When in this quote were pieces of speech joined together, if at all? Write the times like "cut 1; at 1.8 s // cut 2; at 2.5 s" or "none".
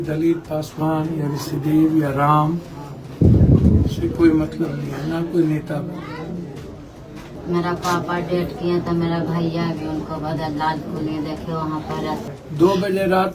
cut 1; at 7.3 s // cut 2; at 12.3 s

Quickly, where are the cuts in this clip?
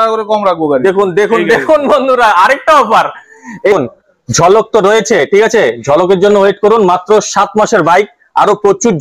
cut 1; at 3.7 s

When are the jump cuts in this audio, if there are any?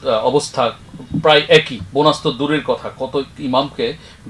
cut 1; at 1.8 s

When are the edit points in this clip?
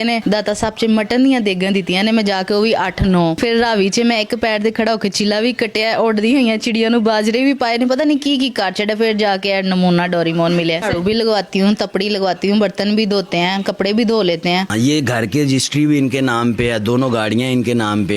cut 1; at 10.8 s // cut 2; at 14.7 s

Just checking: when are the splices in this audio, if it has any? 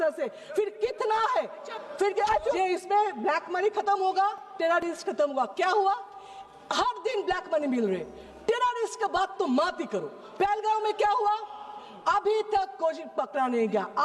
cut 1; at 2.6 s

